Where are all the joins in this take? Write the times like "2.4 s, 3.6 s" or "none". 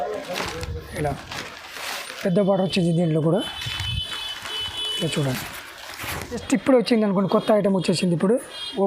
6.4 s